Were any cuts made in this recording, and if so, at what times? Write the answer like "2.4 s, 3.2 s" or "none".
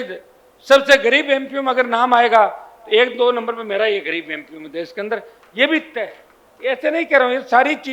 none